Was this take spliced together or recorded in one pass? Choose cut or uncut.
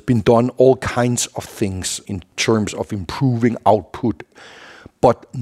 cut